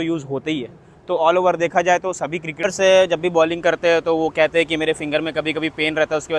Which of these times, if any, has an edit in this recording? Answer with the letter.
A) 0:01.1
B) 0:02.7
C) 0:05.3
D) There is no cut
B